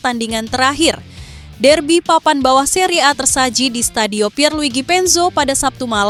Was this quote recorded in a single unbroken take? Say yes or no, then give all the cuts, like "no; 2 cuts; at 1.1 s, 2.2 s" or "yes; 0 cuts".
yes; 0 cuts